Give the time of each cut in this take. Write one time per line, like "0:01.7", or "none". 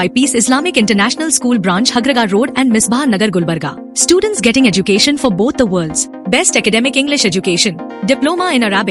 none